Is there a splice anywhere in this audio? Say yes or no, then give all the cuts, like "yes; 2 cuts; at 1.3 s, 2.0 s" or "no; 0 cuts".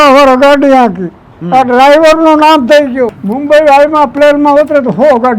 yes; 1 cut; at 3.2 s